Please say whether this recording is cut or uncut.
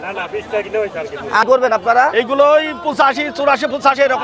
cut